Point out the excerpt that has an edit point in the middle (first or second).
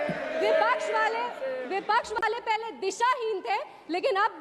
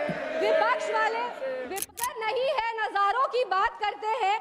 second